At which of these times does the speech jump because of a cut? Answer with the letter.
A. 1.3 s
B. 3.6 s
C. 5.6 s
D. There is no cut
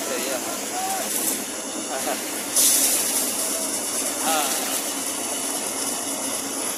D